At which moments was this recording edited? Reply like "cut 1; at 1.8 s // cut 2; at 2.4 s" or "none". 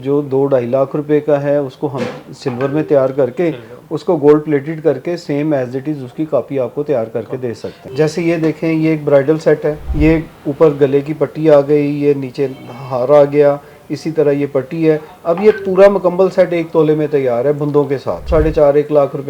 cut 1; at 7.8 s // cut 2; at 9.8 s // cut 3; at 18.2 s